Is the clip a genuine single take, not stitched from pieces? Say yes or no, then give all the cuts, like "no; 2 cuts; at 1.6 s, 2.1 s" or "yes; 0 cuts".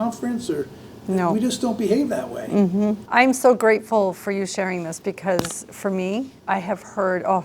no; 2 cuts; at 3.0 s, 6.4 s